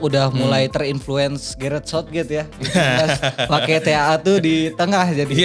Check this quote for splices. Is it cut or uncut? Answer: uncut